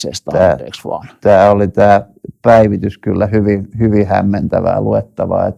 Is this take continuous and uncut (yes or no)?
yes